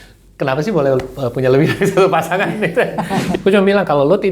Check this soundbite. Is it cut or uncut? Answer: cut